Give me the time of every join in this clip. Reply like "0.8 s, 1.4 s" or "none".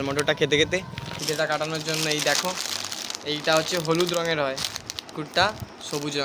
1.1 s, 5.1 s

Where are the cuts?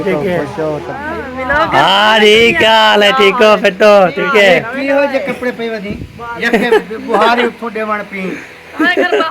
0.9 s, 4.3 s

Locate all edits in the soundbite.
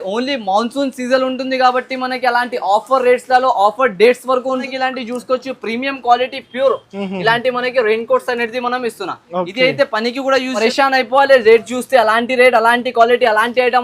4.7 s, 10.6 s

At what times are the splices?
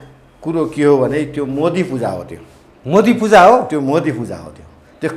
none

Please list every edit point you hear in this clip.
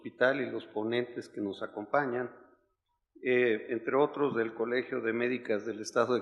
3.6 s

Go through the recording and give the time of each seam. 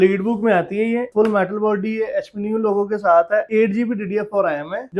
1.1 s

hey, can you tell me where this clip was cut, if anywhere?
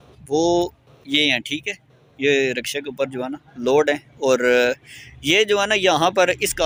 none

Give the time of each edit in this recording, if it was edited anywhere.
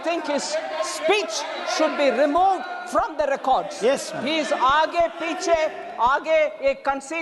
none

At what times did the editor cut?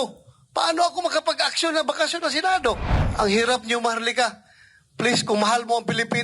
3.0 s

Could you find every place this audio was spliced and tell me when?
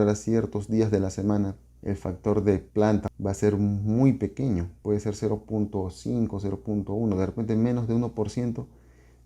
1.7 s, 2.8 s, 4.7 s

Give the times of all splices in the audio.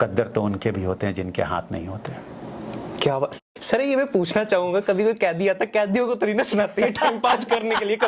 3.4 s

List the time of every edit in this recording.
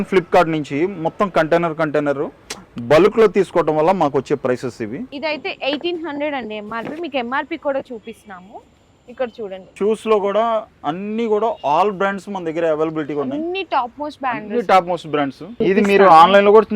5.1 s, 9.7 s, 15.6 s

